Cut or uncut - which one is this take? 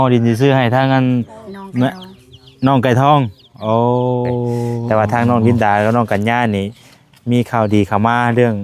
cut